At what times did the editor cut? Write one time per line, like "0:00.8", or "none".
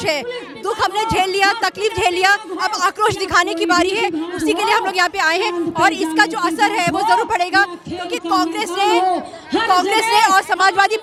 none